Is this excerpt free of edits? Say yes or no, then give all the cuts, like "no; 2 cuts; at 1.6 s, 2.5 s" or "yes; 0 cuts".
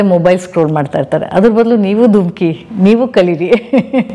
yes; 0 cuts